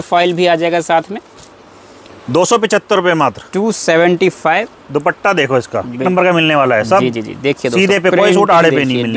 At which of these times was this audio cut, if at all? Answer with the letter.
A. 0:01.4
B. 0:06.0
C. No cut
B